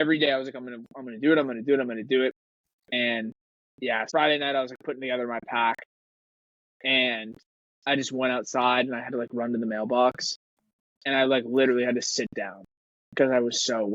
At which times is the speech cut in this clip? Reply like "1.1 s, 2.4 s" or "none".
4.1 s